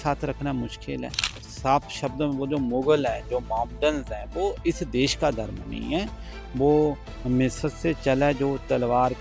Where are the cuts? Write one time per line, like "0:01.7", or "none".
0:01.4